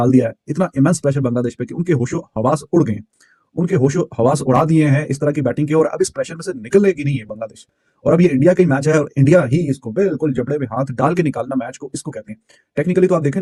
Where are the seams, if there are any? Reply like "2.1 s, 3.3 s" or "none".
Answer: none